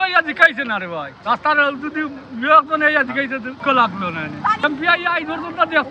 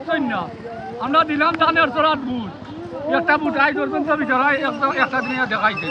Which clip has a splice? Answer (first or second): first